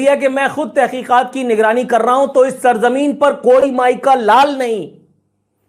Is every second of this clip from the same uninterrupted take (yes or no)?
yes